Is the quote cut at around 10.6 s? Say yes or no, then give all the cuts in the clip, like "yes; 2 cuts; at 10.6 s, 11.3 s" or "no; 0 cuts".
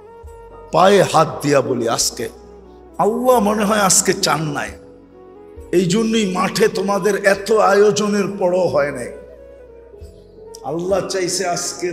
yes; 2 cuts; at 9.2 s, 10.6 s